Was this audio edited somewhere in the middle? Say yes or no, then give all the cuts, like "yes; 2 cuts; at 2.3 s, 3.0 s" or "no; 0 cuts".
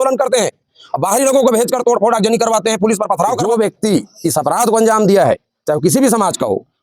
yes; 1 cut; at 3.4 s